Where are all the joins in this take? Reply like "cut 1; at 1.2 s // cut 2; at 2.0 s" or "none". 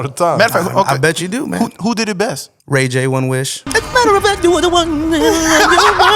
cut 1; at 3.6 s